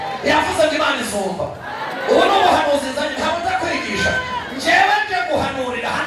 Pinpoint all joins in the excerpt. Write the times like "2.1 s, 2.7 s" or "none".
none